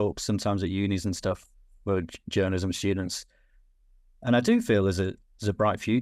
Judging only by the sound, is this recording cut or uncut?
uncut